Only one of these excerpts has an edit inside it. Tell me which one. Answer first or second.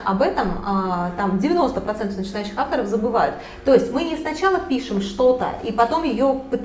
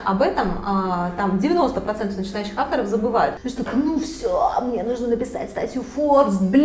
second